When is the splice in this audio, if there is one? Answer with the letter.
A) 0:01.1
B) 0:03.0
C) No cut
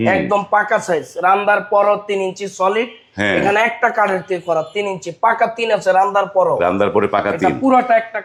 C